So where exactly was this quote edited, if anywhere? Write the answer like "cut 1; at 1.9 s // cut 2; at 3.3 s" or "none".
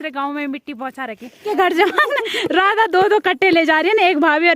cut 1; at 1.5 s